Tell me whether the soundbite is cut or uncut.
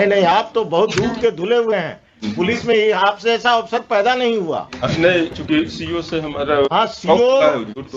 uncut